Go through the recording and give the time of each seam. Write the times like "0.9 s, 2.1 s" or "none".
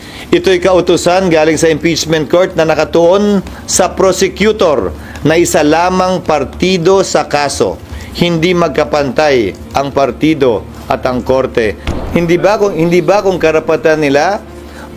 11.9 s